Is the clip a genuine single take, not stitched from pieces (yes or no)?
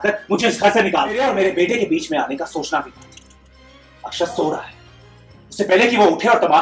no